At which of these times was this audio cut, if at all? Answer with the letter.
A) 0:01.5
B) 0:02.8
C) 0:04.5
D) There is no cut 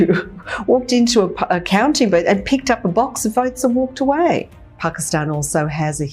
C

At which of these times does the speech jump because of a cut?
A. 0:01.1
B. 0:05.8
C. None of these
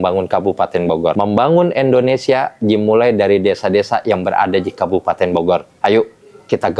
A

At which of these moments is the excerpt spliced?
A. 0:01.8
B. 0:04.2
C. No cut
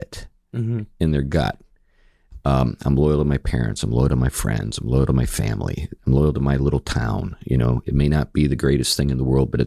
C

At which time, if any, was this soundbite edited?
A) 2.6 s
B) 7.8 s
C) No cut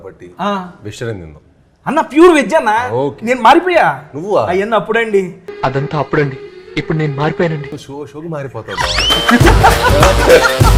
C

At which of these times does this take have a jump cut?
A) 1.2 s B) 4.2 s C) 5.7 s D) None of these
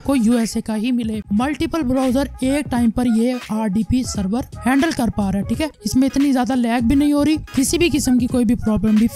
A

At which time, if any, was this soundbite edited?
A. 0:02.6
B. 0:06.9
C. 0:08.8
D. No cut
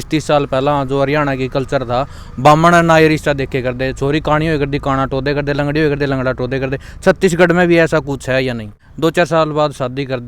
C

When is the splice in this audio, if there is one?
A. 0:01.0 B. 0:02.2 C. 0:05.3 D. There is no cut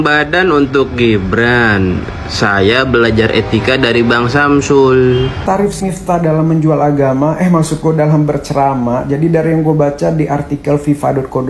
C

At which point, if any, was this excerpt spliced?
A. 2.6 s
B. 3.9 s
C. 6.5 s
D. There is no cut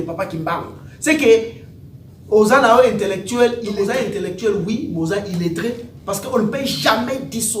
B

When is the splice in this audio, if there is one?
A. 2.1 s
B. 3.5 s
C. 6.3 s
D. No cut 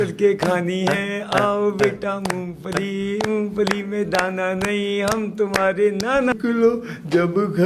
C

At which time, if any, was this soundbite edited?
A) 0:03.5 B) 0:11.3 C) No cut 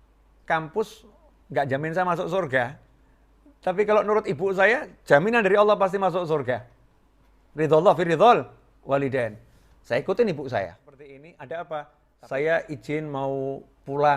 B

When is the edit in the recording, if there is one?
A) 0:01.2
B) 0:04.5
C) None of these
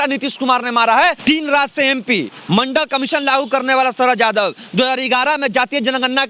A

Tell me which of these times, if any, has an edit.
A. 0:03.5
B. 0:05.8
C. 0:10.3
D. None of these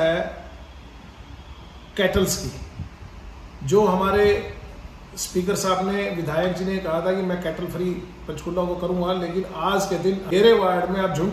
C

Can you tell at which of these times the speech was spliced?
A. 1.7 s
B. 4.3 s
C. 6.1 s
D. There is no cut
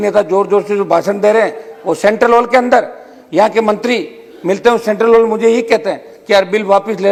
D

